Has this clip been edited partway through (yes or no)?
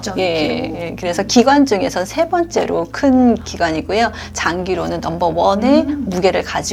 no